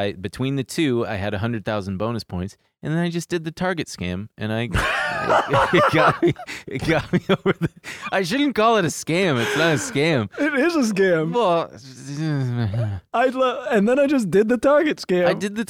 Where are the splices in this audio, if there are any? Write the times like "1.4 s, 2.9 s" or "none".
none